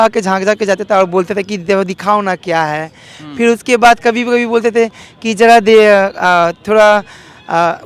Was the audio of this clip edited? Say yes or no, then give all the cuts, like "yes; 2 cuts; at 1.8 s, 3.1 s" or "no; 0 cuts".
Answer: no; 0 cuts